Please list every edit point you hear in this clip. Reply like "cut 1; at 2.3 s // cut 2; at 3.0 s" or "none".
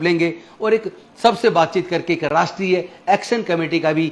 none